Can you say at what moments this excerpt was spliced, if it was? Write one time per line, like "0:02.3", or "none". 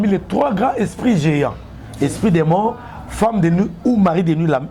none